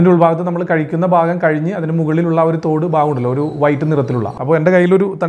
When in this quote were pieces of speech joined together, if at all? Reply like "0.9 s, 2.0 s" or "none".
4.3 s